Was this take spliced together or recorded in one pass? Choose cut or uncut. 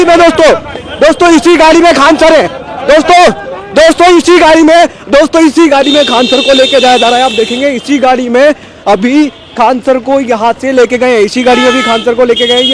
uncut